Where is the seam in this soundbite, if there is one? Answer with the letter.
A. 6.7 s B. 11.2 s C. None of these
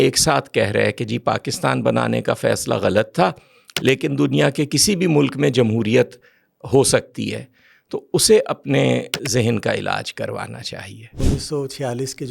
B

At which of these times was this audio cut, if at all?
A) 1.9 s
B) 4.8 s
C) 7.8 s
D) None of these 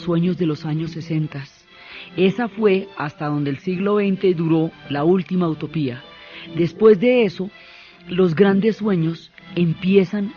D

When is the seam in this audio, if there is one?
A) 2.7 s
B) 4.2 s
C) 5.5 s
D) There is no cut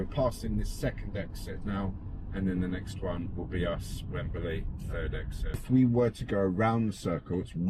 C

